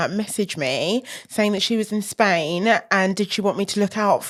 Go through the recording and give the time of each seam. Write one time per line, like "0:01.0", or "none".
none